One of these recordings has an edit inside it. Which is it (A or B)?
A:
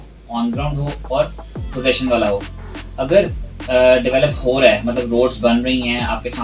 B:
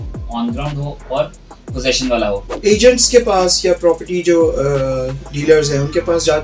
B